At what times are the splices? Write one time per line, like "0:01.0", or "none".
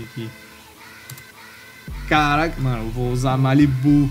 0:02.6